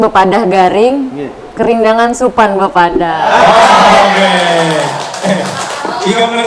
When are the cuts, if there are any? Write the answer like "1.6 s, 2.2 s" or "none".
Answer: none